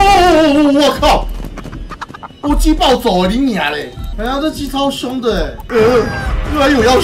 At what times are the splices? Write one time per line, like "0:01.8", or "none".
0:04.0
0:05.6